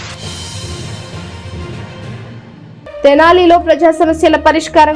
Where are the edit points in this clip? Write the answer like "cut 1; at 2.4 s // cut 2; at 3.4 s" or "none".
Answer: cut 1; at 2.4 s